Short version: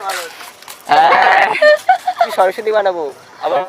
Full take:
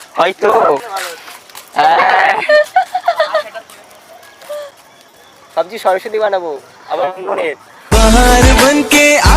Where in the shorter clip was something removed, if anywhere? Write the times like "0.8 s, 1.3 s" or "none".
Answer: 2.3 s